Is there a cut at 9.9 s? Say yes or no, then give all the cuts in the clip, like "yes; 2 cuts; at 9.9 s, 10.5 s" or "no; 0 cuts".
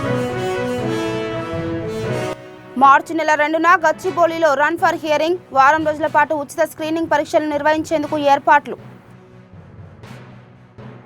no; 1 cut; at 2.3 s